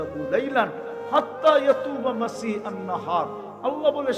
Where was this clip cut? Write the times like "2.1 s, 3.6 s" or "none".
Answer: none

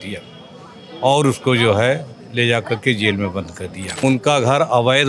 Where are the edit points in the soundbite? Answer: 3.8 s

